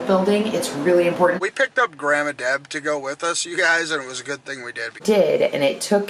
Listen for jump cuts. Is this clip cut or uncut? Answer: cut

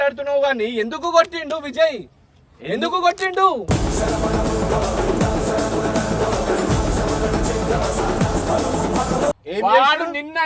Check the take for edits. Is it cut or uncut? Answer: cut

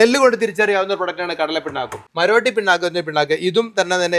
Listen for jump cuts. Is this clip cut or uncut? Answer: cut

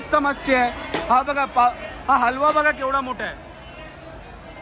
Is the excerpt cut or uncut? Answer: uncut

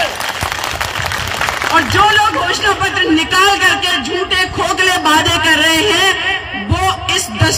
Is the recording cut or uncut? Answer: uncut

